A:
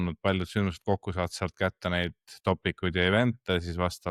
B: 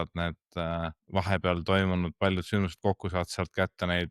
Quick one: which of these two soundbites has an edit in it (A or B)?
B